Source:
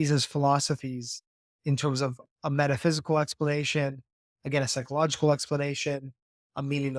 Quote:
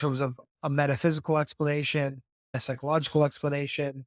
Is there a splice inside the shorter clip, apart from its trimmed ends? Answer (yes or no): yes